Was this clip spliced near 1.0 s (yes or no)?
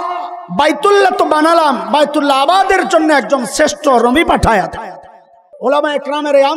no